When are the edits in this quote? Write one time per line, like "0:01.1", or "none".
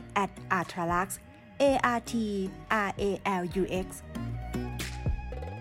0:04.0